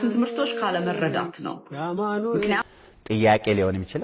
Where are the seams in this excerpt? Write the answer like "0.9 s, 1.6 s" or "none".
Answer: 2.7 s